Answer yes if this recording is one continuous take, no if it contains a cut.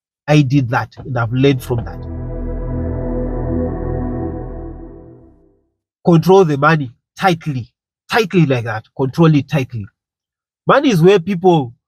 yes